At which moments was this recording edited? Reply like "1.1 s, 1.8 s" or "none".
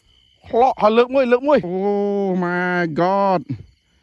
1.7 s